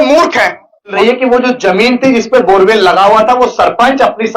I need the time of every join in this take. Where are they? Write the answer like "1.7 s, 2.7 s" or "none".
0.9 s